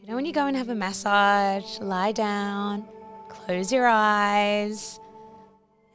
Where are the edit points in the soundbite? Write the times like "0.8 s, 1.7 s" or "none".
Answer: none